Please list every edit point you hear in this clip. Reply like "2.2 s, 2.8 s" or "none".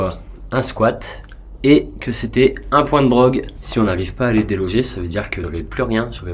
3.6 s, 5.4 s